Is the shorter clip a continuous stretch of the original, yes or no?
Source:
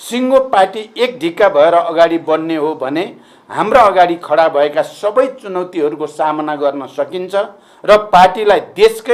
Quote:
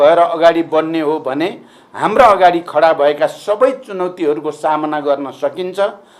yes